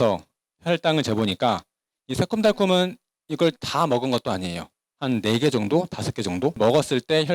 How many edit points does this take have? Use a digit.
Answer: 0